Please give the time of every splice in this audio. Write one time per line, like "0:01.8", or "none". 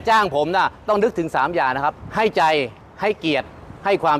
0:02.0
0:02.8